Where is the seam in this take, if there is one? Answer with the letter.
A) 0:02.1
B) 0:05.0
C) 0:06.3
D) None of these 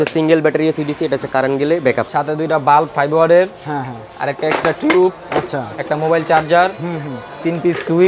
A